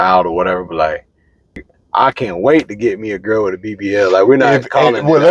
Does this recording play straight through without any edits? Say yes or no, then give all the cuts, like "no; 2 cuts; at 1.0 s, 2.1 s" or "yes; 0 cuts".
no; 1 cut; at 1.6 s